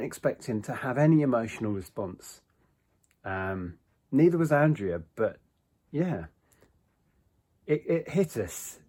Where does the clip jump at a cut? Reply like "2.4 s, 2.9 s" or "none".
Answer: none